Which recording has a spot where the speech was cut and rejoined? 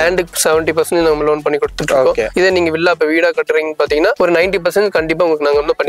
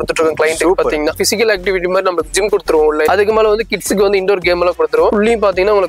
second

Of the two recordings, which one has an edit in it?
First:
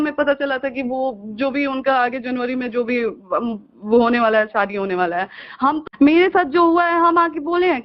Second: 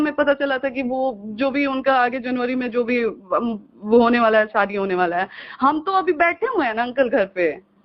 first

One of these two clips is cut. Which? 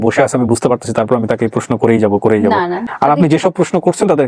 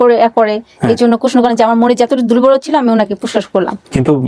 first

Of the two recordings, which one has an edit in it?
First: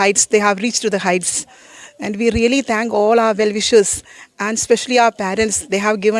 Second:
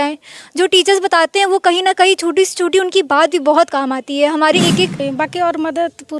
second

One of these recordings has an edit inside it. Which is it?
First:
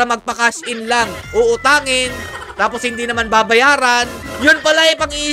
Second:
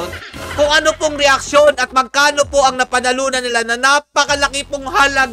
first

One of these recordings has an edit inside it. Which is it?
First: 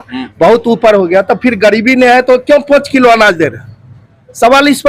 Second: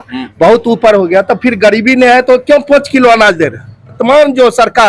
second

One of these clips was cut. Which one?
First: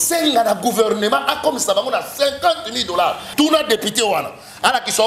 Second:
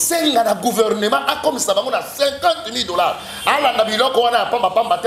first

